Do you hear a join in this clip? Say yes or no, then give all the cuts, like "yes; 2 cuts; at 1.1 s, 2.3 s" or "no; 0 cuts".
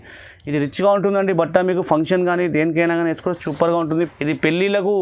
yes; 1 cut; at 4.1 s